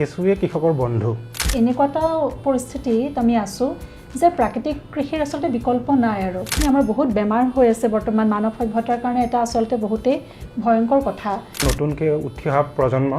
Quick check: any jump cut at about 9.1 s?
no; 3 cuts; at 1.4 s, 6.5 s, 11.7 s

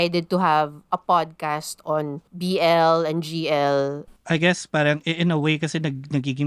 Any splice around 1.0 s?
no; 2 cuts; at 2.2 s, 4.0 s

